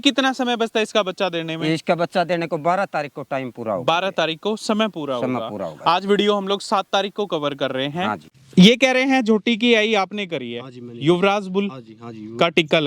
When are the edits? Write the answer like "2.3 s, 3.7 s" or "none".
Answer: 8.3 s